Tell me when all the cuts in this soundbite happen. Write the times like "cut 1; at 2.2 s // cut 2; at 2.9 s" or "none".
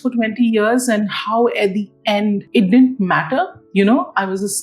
cut 1; at 2.4 s // cut 2; at 3.6 s

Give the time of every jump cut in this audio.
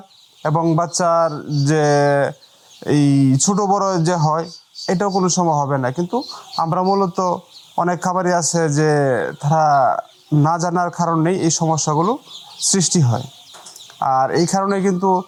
none

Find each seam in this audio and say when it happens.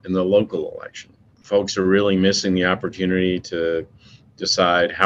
cut 1; at 1.3 s

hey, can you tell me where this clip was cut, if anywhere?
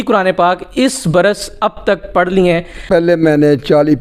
cut 1; at 2.8 s

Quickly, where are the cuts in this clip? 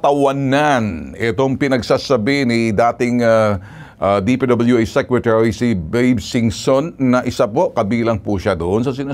none

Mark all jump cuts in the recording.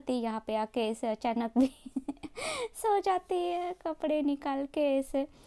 none

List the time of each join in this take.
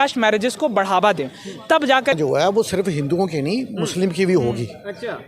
cut 1; at 2.2 s

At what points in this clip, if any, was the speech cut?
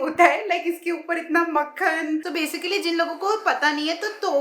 cut 1; at 2.3 s

